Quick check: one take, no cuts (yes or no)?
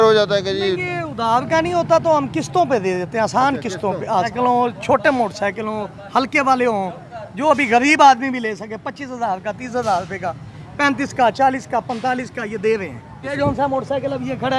no